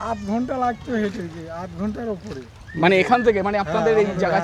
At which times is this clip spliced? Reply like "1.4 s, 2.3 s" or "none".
none